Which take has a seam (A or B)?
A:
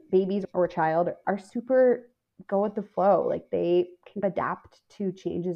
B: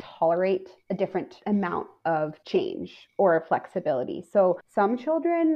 B